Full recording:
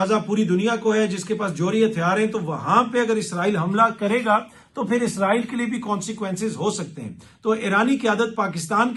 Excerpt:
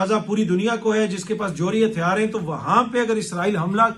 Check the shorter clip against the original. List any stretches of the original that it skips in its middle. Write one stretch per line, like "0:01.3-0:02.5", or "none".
none